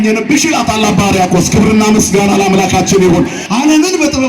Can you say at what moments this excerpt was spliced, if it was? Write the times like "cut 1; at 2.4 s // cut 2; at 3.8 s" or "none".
cut 1; at 3.4 s